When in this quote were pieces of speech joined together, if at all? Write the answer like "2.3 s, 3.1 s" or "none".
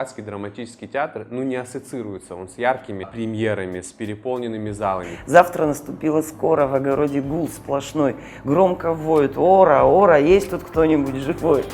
3.1 s, 5.1 s